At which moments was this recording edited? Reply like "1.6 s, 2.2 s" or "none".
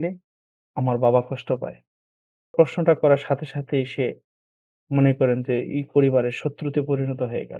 2.5 s